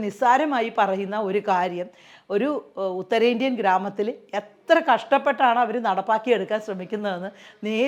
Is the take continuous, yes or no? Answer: yes